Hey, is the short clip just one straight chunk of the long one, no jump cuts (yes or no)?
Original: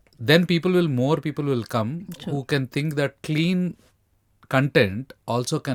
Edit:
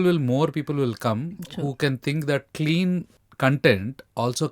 no